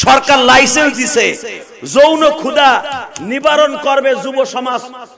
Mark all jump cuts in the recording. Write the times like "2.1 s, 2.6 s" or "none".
none